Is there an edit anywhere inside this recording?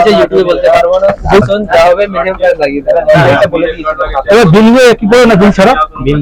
yes; 1 cut; at 1.4 s

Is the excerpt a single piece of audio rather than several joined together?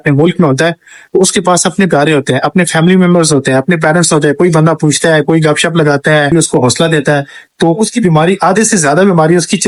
yes; 0 cuts

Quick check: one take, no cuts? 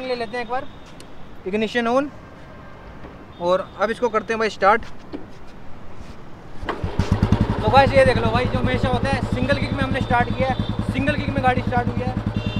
yes; 0 cuts

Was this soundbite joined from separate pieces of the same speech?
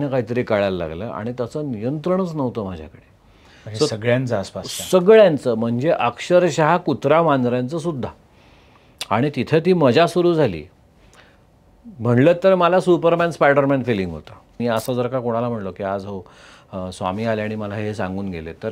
yes; 1 cut; at 14.6 s

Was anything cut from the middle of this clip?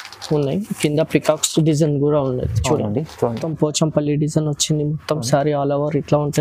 yes; 1 cut; at 3.5 s

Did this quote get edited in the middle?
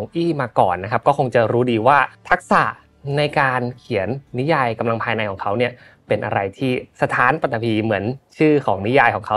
yes; 1 cut; at 2.2 s

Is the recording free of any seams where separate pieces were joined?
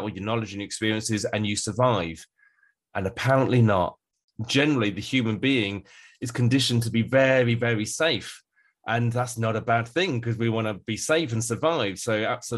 no; 1 cut; at 4.2 s

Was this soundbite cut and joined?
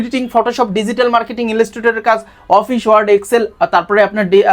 no; 0 cuts

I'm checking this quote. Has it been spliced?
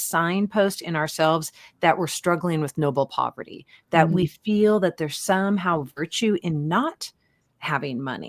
no; 0 cuts

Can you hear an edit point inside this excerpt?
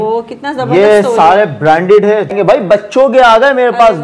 yes; 1 cut; at 2.3 s

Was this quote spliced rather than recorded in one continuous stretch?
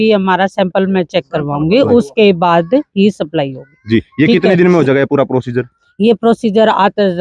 no; 0 cuts

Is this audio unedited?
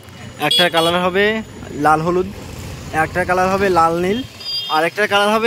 yes; 0 cuts

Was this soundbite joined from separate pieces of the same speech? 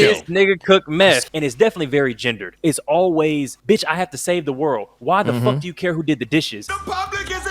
yes; 3 cuts; at 1.2 s, 2.5 s, 3.5 s

